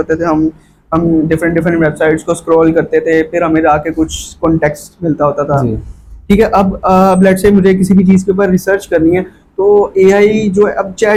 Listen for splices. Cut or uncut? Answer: uncut